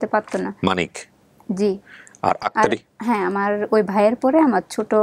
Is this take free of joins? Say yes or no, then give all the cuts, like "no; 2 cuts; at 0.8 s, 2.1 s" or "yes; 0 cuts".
yes; 0 cuts